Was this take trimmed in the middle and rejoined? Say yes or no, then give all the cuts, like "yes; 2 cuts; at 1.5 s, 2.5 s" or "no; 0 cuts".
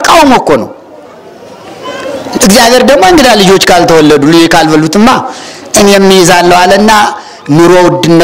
no; 0 cuts